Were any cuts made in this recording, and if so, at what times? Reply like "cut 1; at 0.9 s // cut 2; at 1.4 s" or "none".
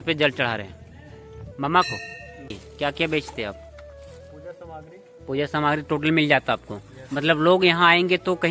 cut 1; at 2.6 s